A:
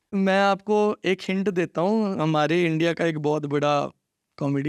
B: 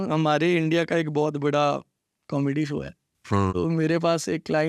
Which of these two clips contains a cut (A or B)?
B